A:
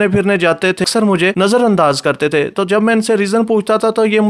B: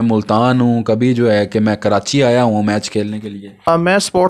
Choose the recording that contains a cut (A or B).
A